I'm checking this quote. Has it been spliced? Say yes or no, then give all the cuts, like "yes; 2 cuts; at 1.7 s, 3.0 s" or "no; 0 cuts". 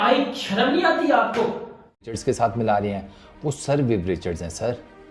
yes; 1 cut; at 2.1 s